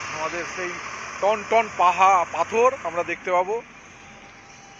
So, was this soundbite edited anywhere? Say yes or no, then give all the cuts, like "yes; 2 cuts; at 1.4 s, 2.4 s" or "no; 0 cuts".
no; 0 cuts